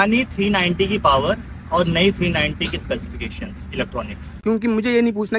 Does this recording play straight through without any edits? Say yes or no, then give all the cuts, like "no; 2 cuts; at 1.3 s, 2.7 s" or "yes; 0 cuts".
no; 1 cut; at 4.4 s